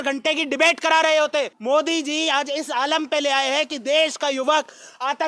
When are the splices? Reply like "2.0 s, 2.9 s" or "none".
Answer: 1.6 s